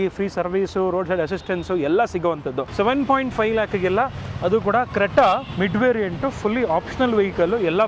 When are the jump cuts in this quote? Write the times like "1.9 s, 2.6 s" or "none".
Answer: 2.6 s